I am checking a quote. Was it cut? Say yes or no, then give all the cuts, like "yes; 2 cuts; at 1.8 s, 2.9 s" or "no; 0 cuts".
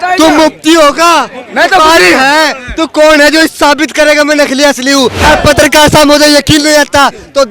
yes; 1 cut; at 5.2 s